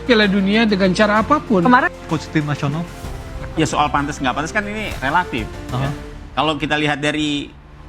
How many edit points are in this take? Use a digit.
1